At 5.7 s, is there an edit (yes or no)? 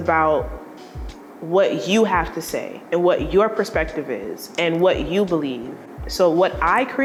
no